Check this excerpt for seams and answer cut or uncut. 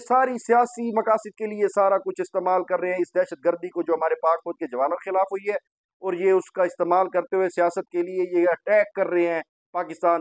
uncut